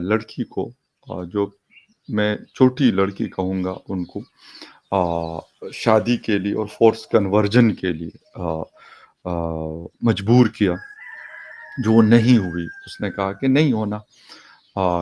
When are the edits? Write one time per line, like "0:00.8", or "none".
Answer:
none